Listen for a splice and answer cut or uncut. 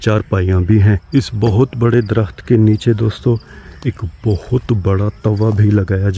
cut